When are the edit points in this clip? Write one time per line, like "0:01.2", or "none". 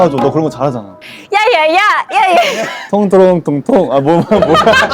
0:01.0